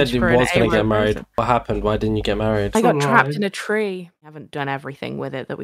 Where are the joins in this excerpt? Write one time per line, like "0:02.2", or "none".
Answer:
0:04.3